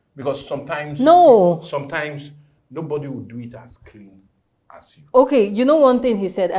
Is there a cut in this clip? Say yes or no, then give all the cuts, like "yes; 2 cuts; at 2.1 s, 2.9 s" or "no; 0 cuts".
no; 0 cuts